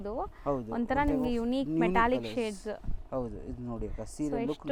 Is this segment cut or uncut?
uncut